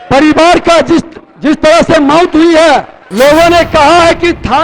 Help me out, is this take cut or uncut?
cut